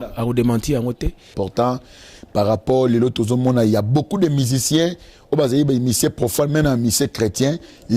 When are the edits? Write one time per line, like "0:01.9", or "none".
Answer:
0:01.3